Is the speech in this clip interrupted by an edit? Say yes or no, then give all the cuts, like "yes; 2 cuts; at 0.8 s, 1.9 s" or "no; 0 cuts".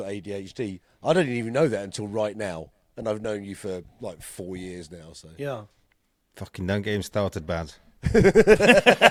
no; 0 cuts